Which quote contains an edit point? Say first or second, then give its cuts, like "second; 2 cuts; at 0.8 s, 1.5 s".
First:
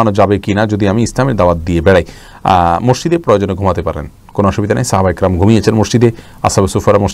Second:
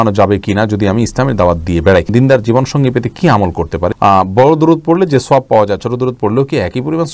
second; 2 cuts; at 2.1 s, 3.9 s